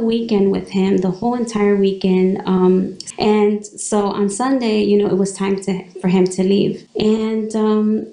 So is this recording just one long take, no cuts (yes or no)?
no